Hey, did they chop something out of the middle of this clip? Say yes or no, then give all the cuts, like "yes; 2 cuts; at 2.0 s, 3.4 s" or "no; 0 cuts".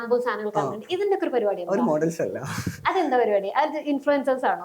no; 0 cuts